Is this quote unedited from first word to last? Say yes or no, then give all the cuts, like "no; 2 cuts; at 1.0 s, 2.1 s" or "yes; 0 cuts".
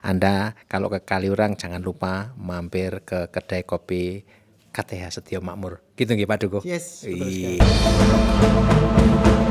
no; 1 cut; at 7.6 s